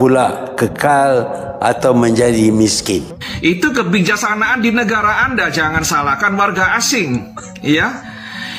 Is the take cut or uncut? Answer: cut